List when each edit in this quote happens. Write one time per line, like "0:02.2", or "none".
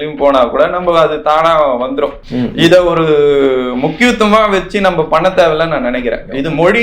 0:02.2